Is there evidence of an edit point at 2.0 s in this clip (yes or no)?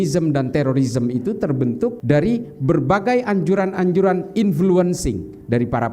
yes